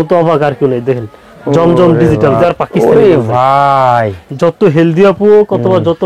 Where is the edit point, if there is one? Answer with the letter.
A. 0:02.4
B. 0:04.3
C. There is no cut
A